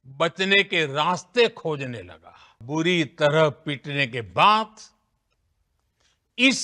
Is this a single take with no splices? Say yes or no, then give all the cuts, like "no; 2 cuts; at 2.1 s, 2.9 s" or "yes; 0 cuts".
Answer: no; 1 cut; at 2.6 s